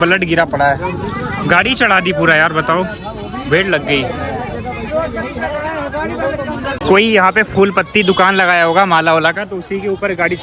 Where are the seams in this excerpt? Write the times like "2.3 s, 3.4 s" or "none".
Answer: none